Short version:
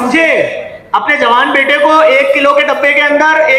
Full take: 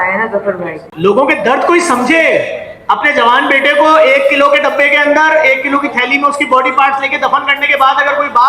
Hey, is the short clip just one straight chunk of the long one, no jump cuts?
yes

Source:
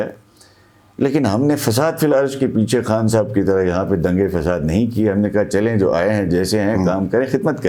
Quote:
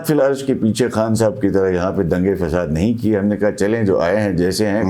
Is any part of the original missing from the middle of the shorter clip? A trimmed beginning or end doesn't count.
no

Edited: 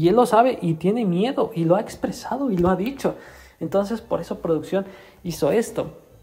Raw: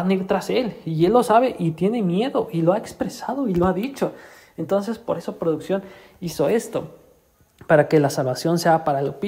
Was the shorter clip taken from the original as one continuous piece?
yes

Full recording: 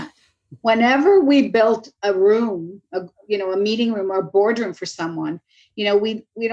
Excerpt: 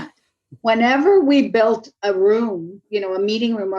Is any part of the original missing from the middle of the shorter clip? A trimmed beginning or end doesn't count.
yes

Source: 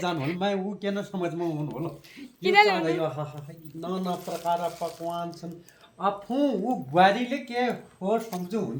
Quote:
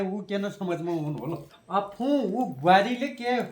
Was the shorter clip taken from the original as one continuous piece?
no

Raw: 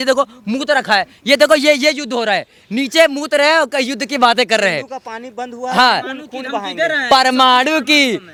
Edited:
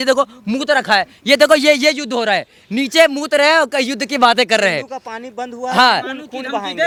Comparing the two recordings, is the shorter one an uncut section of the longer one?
yes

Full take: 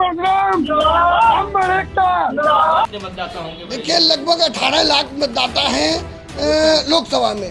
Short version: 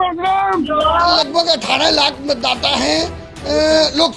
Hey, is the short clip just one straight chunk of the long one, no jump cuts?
no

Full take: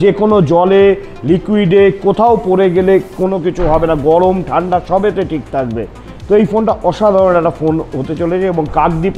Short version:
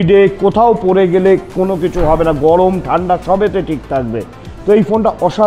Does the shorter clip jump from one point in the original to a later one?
no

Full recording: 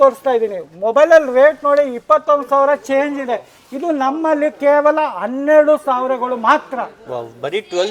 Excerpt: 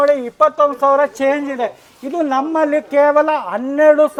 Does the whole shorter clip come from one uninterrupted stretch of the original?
yes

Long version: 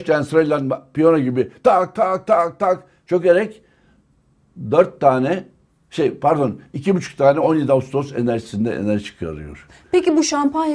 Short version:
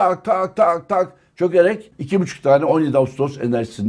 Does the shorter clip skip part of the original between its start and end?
yes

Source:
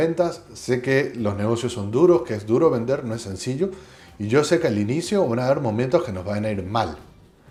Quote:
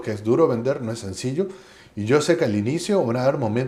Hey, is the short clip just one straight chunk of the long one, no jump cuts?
yes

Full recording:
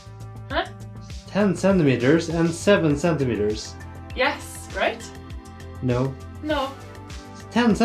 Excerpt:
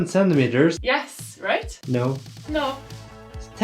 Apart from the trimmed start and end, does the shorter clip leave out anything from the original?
yes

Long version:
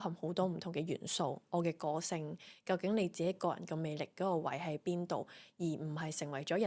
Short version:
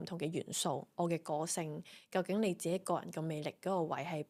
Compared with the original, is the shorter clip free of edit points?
yes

